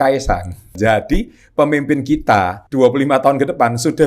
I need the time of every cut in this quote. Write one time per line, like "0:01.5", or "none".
0:00.7
0:02.6